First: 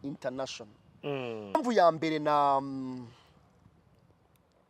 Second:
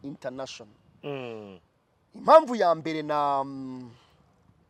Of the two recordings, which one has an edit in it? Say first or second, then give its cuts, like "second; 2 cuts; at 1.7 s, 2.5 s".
first; 1 cut; at 1.6 s